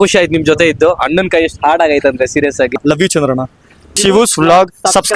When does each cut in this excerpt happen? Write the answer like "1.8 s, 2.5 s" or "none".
2.7 s, 4.0 s